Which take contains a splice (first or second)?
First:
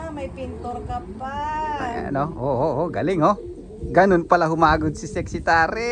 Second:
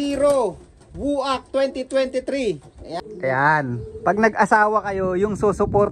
second